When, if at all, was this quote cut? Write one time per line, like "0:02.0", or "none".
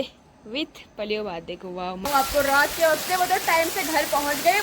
0:02.1